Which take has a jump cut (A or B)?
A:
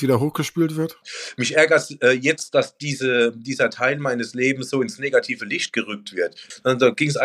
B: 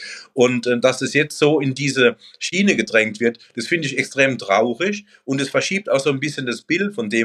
A